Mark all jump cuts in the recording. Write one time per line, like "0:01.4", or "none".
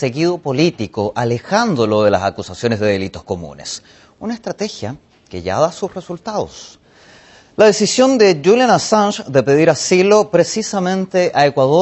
none

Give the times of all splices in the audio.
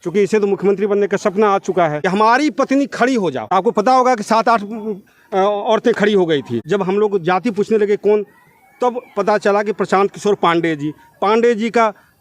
0:02.0
0:03.4
0:06.6

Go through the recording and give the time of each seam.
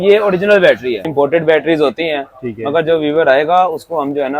0:01.1

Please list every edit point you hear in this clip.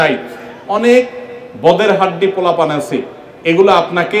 none

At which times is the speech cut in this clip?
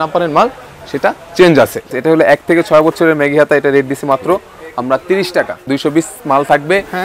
0:01.9
0:05.6

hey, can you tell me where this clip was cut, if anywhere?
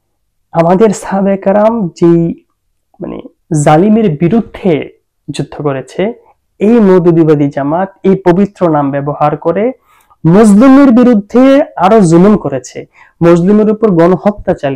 none

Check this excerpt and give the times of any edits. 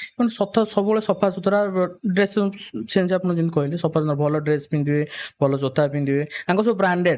none

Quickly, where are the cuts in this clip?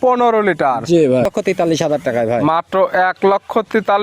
0:01.3

